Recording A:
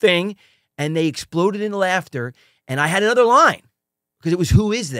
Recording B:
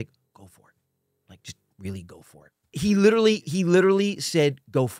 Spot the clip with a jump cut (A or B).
B